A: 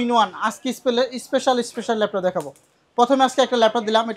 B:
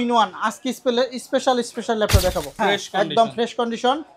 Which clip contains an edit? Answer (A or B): B